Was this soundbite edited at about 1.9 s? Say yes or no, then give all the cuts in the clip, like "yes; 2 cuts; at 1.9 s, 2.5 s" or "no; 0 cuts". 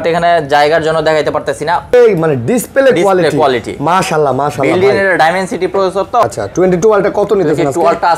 yes; 2 cuts; at 1.9 s, 6.2 s